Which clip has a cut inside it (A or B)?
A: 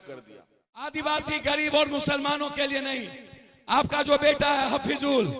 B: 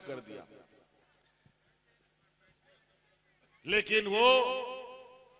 A